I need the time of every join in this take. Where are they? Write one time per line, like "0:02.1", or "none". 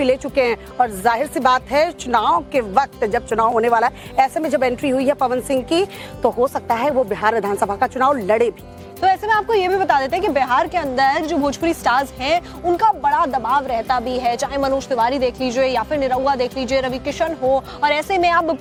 none